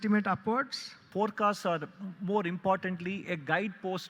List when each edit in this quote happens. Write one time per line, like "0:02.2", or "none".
0:01.1

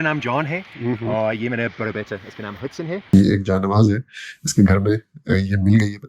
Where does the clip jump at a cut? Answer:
0:03.1

